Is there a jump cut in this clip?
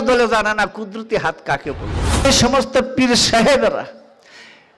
yes; 1 cut; at 2.2 s

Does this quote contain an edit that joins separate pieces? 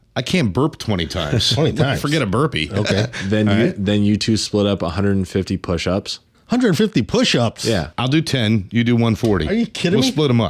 no; 0 cuts

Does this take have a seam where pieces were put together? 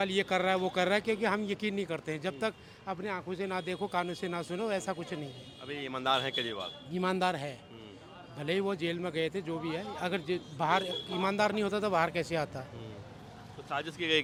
no; 0 cuts

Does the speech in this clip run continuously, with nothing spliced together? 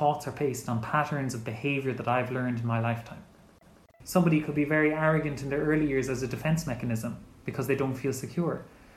no; 1 cut; at 3.9 s

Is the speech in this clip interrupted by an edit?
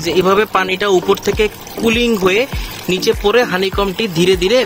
no; 0 cuts

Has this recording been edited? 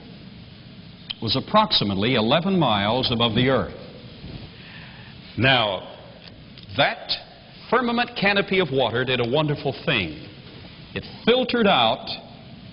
yes; 1 cut; at 5.8 s

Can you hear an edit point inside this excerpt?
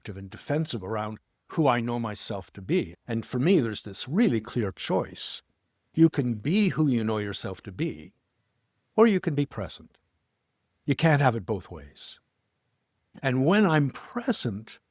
no; 0 cuts

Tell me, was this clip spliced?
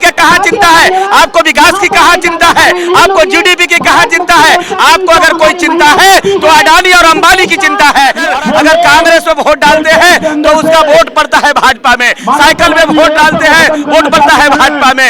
yes; 1 cut; at 8.3 s

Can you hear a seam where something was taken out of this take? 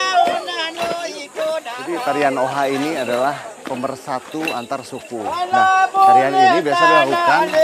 yes; 1 cut; at 1.8 s

